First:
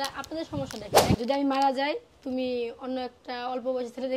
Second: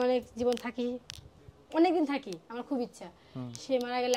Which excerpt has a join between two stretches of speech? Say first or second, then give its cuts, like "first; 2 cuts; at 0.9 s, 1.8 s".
first; 1 cut; at 1.2 s